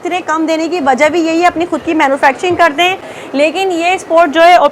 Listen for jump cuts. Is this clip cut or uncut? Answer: uncut